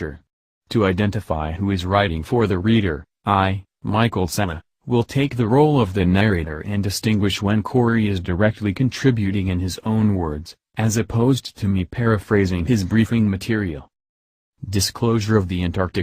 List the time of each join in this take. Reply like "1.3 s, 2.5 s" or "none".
5.4 s